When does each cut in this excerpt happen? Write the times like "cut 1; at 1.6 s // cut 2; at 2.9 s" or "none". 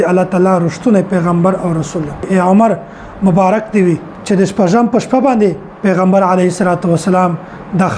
cut 1; at 2.3 s // cut 2; at 4.1 s